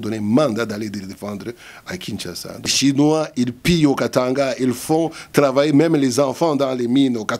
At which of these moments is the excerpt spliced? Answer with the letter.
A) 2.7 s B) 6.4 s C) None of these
A